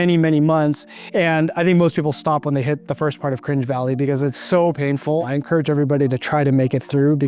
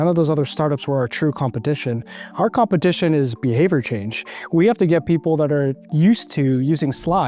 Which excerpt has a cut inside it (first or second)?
first